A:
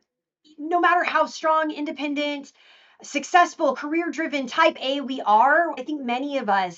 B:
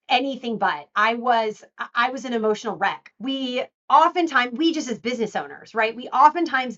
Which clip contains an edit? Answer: B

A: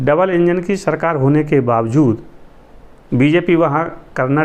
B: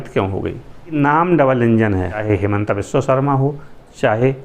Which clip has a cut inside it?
B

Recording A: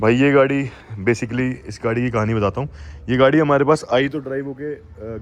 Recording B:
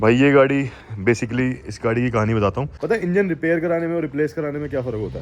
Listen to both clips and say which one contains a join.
B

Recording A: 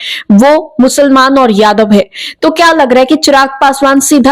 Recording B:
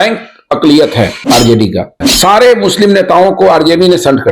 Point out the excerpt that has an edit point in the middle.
B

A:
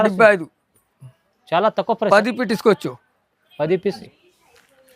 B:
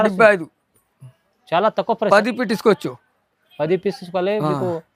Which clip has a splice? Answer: A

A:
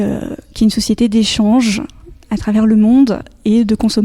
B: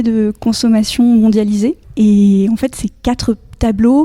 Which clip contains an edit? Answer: B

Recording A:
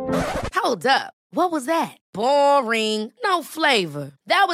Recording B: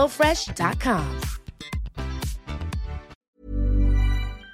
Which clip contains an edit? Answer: B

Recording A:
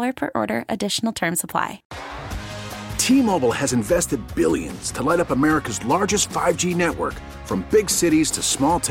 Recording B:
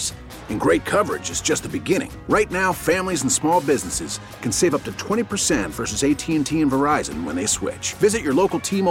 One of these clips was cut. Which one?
A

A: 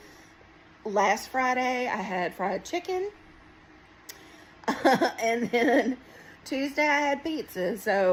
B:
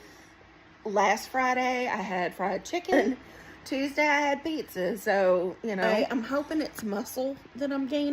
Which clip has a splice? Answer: B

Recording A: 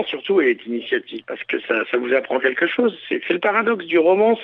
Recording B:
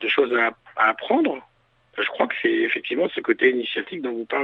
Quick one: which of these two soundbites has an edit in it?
A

